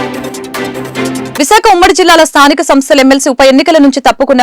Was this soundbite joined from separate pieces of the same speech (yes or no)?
yes